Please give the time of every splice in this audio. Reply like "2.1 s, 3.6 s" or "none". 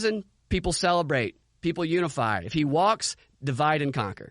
none

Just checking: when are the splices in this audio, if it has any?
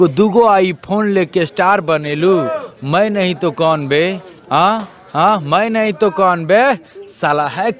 none

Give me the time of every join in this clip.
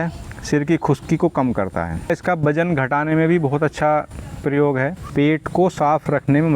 2.1 s, 5.0 s

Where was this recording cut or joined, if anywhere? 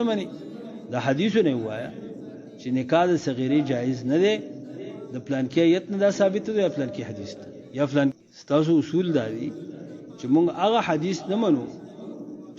8.1 s

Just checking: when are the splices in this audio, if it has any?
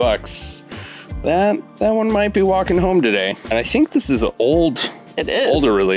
3.4 s

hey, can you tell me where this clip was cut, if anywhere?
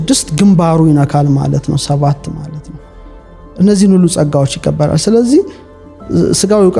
none

